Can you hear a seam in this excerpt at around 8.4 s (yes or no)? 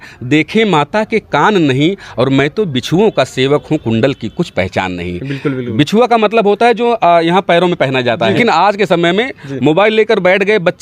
yes